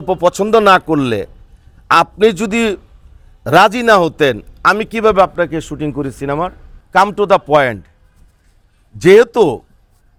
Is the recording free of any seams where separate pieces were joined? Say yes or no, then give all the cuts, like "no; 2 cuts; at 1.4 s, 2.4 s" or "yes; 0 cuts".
yes; 0 cuts